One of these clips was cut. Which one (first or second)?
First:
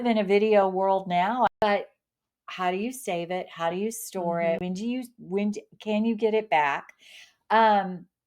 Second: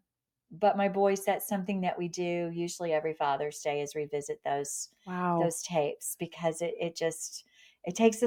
first